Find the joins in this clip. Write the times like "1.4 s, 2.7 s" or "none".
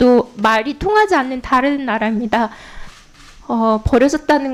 none